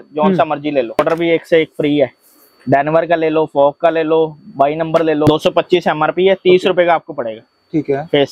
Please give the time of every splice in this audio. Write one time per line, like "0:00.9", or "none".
0:01.0
0:05.3